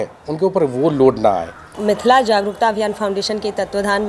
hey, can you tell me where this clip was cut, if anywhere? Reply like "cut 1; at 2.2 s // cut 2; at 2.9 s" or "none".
cut 1; at 1.7 s